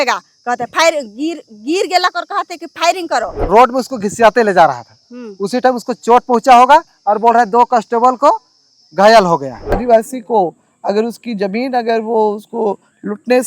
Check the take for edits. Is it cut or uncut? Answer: cut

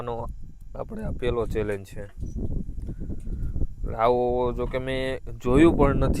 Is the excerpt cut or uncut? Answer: uncut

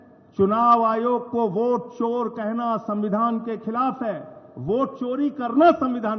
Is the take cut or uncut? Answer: uncut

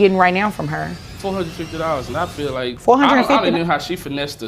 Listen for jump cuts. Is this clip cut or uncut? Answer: cut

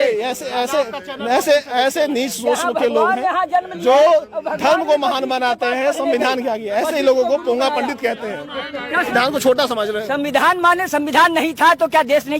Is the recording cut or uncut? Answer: cut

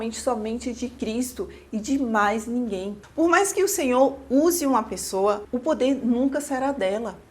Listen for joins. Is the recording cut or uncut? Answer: cut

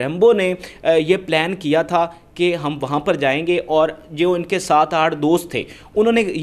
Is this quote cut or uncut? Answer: uncut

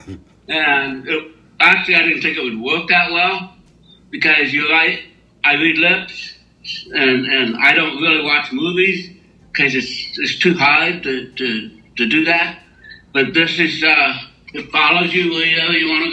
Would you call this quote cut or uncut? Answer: uncut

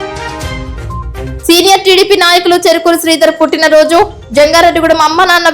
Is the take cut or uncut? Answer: cut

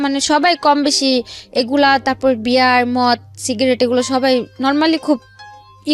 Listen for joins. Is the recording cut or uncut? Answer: uncut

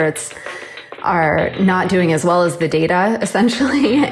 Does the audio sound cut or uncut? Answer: uncut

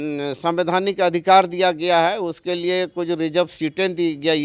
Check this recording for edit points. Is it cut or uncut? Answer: uncut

